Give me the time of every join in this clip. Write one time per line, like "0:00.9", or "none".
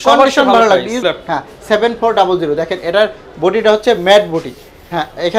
0:01.0

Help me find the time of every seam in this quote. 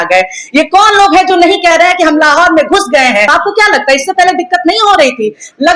0:03.3

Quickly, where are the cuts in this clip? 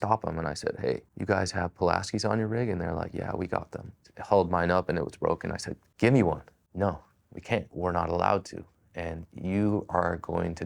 0:01.1
0:06.6

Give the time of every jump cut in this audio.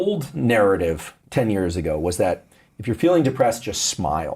0:01.1

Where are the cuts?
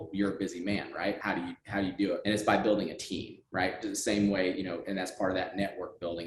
0:01.2
0:02.2

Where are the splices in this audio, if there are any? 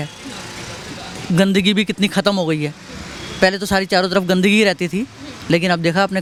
none

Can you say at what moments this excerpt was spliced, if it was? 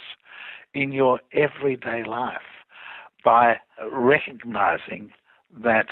0:03.9

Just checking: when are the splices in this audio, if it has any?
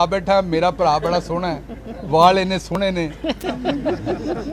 none

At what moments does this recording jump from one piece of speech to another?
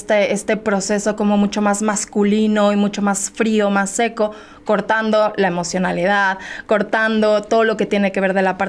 none

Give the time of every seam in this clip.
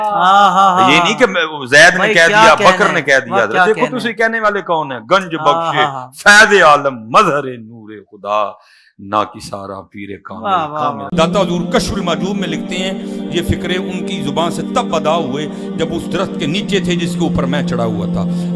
0:11.0

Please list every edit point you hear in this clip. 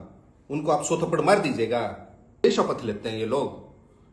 0:02.4

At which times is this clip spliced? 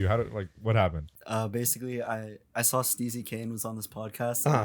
0:01.1

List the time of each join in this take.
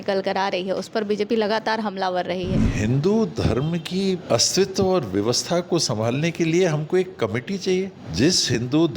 0:02.7
0:04.2
0:08.0

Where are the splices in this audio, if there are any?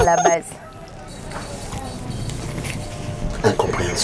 none

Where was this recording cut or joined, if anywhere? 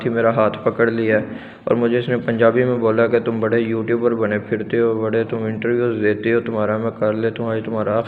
none

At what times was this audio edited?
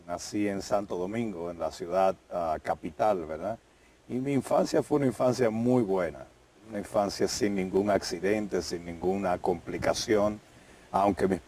0:07.1

